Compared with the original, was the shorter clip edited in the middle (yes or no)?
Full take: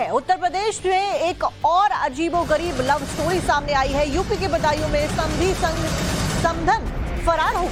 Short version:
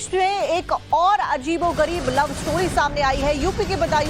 no